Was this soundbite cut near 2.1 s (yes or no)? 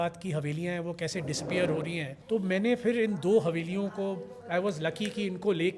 yes